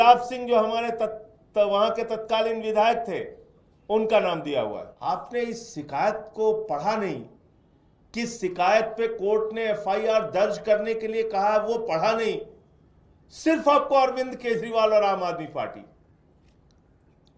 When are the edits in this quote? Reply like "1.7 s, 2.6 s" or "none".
4.9 s